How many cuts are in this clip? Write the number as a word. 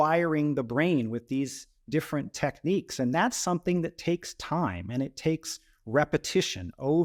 zero